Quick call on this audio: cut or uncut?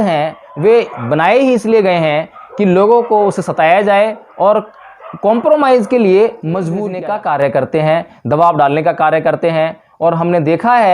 cut